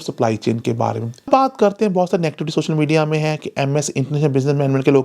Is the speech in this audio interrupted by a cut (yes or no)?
yes